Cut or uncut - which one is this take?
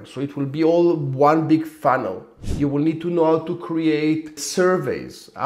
cut